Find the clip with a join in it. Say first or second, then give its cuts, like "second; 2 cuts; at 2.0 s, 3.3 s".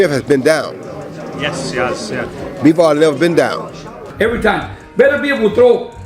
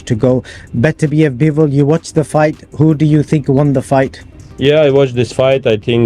first; 1 cut; at 4.1 s